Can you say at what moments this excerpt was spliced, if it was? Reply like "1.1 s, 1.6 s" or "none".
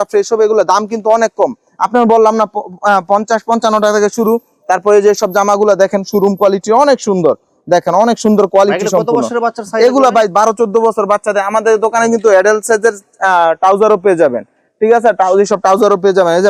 none

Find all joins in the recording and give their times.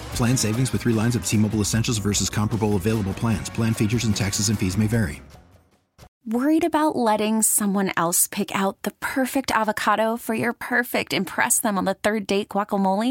6.1 s

